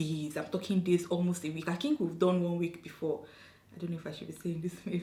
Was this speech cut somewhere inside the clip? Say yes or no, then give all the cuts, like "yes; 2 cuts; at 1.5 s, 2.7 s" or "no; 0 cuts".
no; 0 cuts